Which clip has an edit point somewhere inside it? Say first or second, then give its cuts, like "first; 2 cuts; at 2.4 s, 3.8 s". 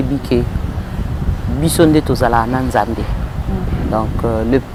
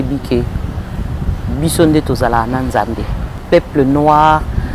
second; 1 cut; at 3.4 s